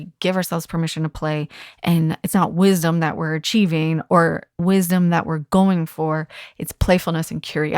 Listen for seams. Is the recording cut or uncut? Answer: cut